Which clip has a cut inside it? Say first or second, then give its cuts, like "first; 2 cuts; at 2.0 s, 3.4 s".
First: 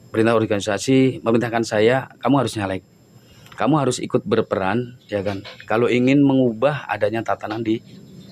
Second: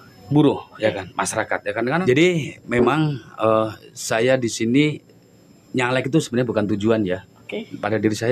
second; 1 cut; at 2.0 s